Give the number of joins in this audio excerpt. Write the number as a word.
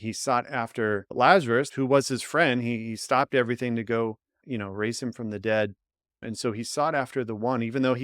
two